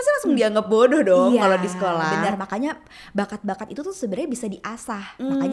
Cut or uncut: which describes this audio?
uncut